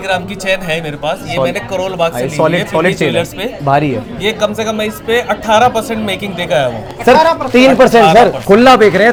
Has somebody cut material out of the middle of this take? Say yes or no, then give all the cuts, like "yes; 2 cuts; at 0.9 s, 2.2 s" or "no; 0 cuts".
no; 0 cuts